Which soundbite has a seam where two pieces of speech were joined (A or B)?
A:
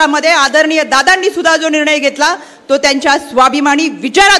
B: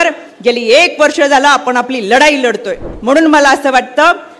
B